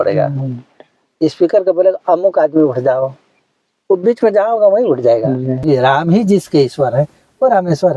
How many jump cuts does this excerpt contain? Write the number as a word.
one